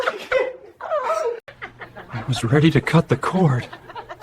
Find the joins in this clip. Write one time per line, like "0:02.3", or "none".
0:01.6